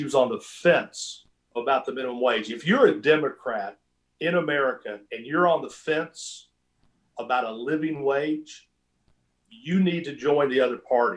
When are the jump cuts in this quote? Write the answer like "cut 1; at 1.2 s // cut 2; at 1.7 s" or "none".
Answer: cut 1; at 1.5 s